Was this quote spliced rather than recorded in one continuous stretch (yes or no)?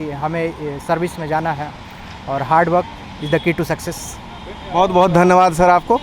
no